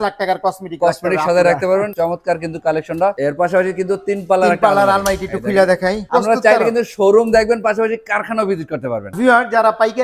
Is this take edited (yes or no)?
yes